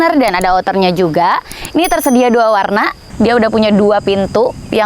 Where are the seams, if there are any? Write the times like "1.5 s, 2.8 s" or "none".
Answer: 3.1 s